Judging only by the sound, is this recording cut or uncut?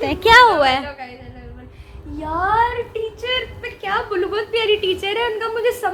uncut